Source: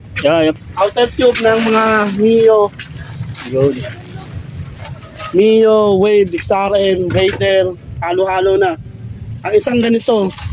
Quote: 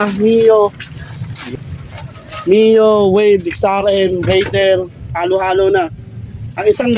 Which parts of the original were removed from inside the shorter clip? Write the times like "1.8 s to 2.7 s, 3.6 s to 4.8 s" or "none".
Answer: 3.4 s to 4.3 s